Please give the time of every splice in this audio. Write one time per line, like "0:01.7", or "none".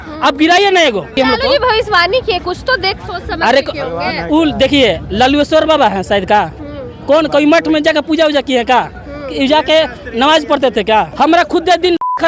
0:01.2
0:11.1